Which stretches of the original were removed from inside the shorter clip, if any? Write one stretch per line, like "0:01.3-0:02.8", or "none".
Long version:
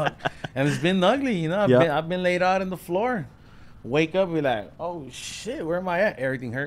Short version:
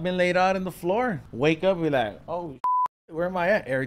0:03.3-0:03.8